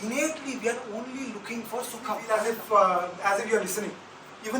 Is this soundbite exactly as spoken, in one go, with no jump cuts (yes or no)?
no